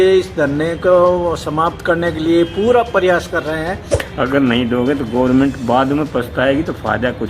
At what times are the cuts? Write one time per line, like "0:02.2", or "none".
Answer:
0:04.0